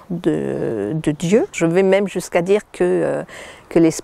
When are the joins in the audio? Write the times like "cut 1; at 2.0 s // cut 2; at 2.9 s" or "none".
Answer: cut 1; at 1.5 s